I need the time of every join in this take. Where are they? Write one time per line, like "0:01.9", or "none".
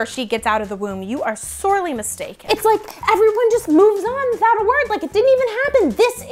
0:02.4